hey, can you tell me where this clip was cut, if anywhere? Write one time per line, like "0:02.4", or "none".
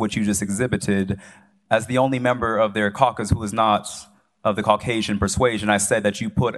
none